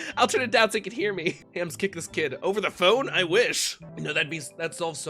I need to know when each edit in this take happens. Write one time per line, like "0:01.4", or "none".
0:01.4
0:03.8